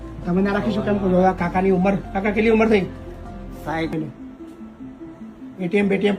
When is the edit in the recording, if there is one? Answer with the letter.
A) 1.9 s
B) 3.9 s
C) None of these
B